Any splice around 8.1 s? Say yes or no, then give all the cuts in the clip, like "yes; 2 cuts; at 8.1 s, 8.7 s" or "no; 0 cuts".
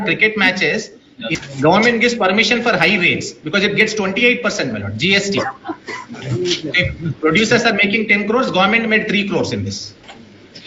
no; 1 cut; at 1.3 s